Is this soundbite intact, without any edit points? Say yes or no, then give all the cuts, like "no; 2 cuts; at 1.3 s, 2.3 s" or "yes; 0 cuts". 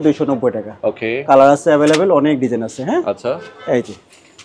yes; 0 cuts